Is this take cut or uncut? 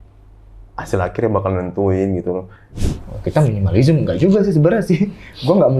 cut